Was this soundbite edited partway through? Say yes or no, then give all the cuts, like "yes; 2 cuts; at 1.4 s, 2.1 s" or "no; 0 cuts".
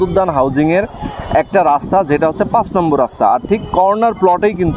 no; 0 cuts